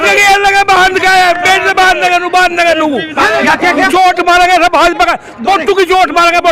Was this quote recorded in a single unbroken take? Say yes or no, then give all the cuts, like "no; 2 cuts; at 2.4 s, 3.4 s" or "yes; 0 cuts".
no; 1 cut; at 3.4 s